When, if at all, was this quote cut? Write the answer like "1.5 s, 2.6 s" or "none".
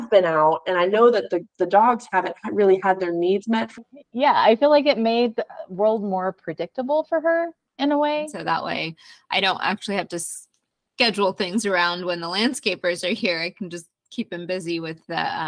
3.8 s, 8.3 s